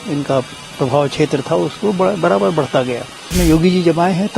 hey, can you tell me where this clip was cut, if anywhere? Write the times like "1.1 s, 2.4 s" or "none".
3.3 s